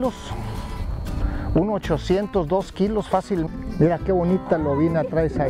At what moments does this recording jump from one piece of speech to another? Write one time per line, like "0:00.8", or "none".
0:03.5